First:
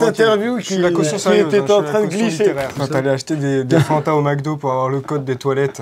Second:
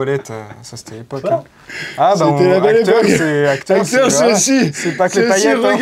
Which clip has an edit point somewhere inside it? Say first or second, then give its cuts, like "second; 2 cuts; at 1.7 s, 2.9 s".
first; 1 cut; at 2.8 s